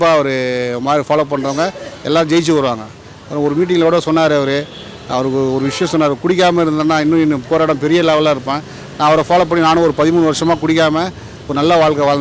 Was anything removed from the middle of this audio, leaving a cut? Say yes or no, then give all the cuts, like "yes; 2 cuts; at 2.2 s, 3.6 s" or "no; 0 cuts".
no; 0 cuts